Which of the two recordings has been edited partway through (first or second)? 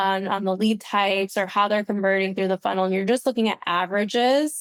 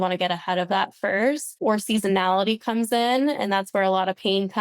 second